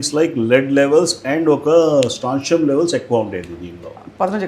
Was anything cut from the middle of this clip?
no; 0 cuts

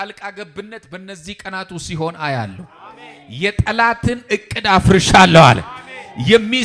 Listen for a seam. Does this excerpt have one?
no; 0 cuts

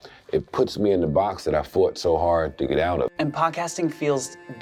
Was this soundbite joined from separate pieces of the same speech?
yes; 1 cut; at 3.1 s

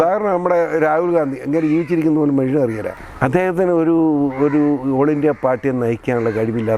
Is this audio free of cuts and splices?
no; 1 cut; at 2.9 s

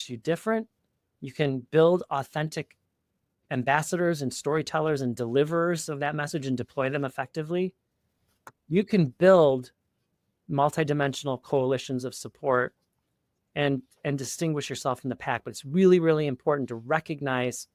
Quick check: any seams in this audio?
no; 0 cuts

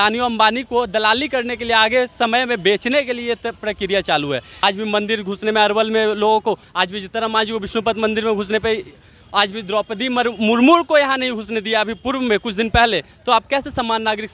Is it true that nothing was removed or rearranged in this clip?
no; 1 cut; at 4.5 s

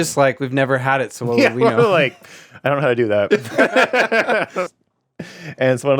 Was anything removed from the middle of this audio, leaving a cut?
yes; 1 cut; at 4.7 s

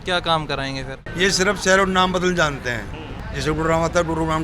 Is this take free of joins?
no; 1 cut; at 1.1 s

